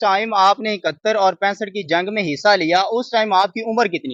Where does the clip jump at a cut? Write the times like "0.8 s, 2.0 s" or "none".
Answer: none